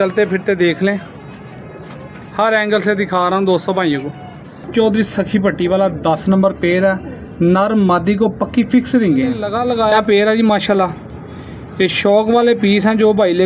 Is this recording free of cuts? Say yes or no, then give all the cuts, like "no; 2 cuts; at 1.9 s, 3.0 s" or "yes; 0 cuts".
no; 2 cuts; at 4.7 s, 9.5 s